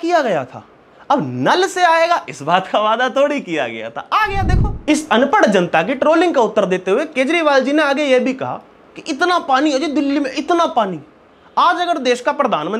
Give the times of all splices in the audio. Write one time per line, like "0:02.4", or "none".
0:04.7